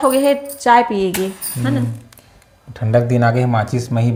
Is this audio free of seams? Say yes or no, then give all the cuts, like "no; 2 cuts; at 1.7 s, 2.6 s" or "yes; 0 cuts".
yes; 0 cuts